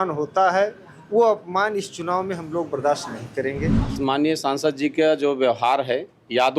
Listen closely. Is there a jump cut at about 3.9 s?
yes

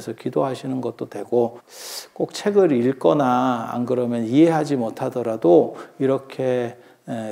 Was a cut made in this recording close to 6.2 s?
no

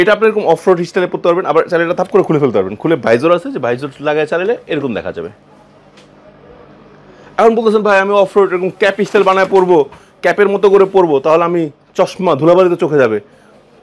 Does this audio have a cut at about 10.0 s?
no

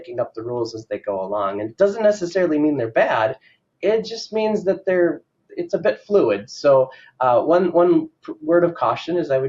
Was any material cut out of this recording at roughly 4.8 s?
no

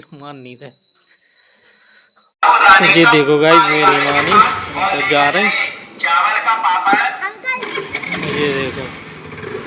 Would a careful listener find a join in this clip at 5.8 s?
no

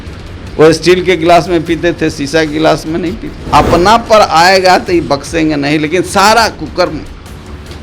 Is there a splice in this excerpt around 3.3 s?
yes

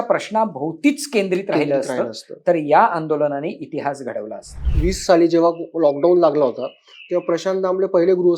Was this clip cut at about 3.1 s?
no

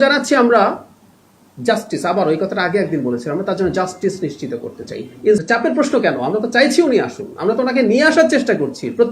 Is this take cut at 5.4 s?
yes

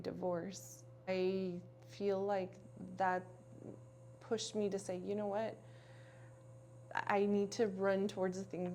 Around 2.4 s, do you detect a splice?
no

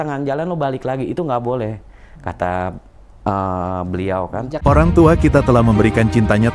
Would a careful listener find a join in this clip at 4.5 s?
yes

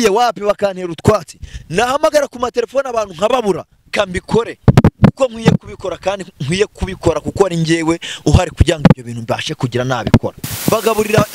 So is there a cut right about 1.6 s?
no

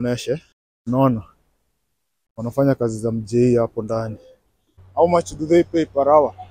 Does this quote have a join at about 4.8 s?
yes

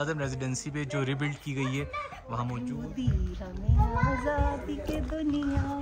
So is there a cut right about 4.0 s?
no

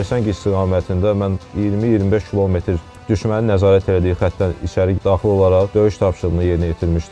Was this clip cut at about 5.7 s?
yes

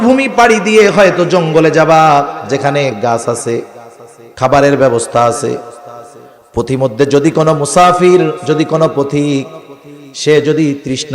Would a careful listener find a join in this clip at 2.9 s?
yes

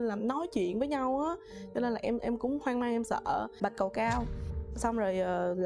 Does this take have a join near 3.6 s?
yes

